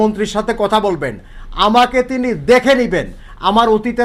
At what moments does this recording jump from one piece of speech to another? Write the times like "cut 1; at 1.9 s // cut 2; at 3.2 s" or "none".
none